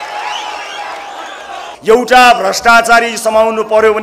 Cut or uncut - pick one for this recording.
cut